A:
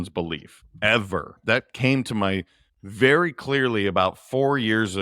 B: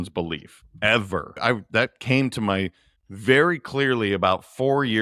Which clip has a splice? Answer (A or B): A